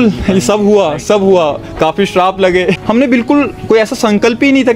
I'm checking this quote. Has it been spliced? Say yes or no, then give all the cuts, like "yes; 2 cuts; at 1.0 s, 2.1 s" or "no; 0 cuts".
yes; 1 cut; at 2.8 s